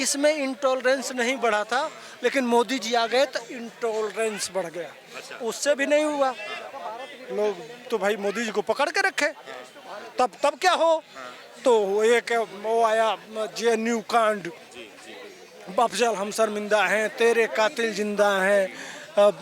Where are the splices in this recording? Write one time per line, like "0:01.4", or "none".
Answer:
none